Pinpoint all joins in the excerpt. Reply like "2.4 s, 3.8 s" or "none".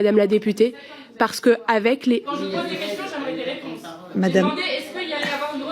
2.3 s, 4.0 s